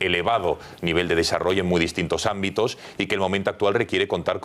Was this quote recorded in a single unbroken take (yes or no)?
no